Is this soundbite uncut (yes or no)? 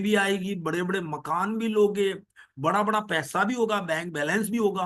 yes